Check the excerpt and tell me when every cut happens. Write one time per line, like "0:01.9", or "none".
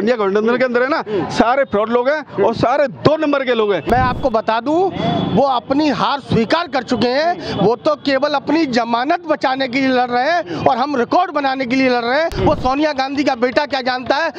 0:03.9
0:12.3